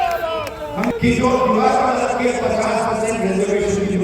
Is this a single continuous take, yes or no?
no